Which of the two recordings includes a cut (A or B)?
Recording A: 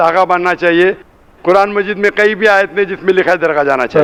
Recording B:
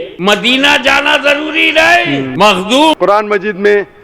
B